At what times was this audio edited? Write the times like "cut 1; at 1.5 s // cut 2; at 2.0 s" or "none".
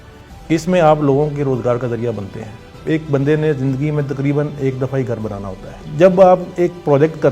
cut 1; at 2.7 s // cut 2; at 5.8 s